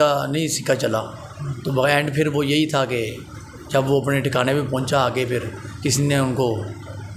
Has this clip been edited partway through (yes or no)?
no